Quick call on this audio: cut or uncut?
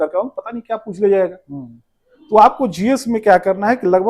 uncut